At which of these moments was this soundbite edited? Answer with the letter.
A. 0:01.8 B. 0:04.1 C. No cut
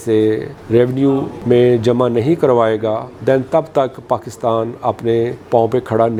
C